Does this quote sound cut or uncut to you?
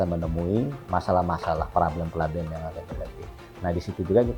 uncut